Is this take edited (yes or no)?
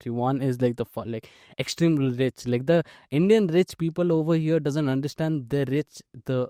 no